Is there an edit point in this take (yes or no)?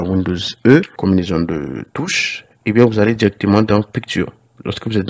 yes